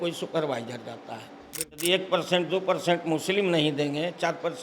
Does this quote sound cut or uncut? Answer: cut